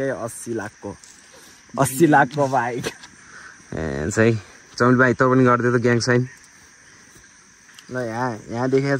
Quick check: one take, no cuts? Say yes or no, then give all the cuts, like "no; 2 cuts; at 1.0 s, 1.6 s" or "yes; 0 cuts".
yes; 0 cuts